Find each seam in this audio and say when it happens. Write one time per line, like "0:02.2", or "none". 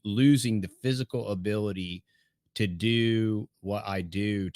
0:03.5